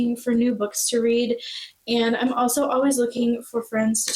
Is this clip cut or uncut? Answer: uncut